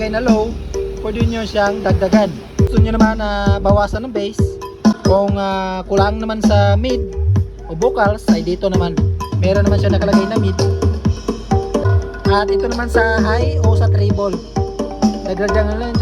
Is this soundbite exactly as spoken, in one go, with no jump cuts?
no; 3 cuts; at 2.7 s, 5.0 s, 11.8 s

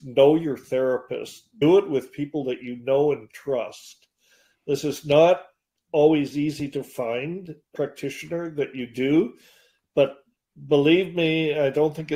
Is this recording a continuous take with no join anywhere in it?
no; 2 cuts; at 1.5 s, 7.7 s

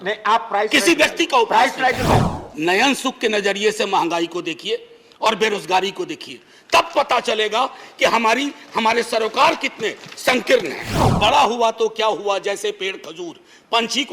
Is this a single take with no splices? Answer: no; 2 cuts; at 2.4 s, 11.0 s

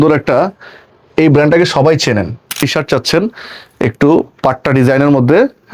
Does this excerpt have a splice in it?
yes; 1 cut; at 2.6 s

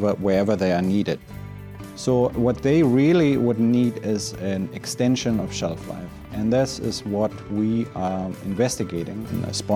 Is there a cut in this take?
yes; 1 cut; at 1.7 s

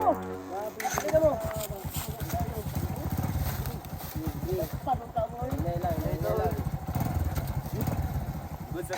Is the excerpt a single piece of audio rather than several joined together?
yes; 0 cuts

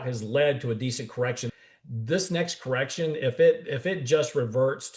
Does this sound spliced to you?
yes; 1 cut; at 1.5 s

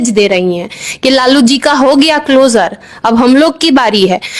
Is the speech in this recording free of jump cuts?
yes; 0 cuts

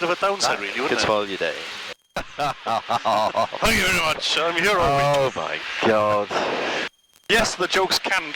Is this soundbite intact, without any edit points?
no; 1 cut; at 2.3 s

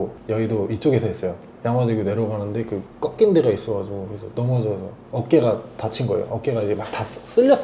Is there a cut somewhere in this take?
no; 0 cuts

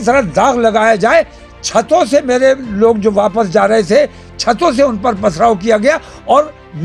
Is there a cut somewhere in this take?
no; 0 cuts

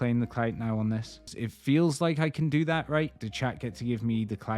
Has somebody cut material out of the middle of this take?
yes; 2 cuts; at 1.4 s, 3.2 s

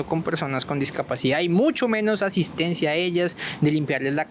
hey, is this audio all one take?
yes; 0 cuts

